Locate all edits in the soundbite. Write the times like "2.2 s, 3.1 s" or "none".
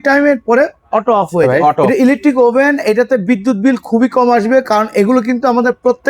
1.9 s